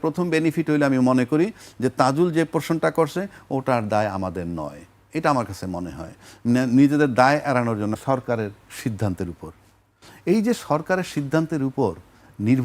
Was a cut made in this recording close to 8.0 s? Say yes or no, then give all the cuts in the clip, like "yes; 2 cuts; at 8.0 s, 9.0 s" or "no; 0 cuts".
yes; 1 cut; at 8.0 s